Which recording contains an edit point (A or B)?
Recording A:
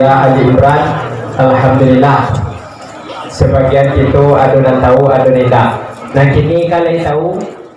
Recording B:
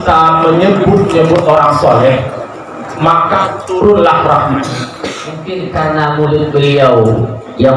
B